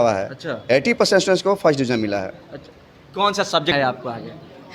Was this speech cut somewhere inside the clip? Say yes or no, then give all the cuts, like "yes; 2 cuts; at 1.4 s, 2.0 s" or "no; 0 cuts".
yes; 1 cut; at 3.7 s